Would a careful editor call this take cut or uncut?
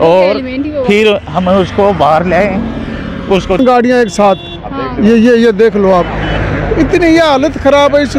cut